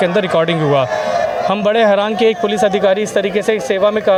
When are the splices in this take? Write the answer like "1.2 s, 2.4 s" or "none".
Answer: none